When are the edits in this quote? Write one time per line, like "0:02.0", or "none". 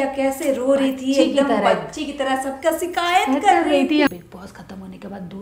0:04.1